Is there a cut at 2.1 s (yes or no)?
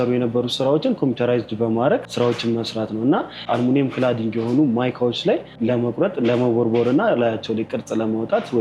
yes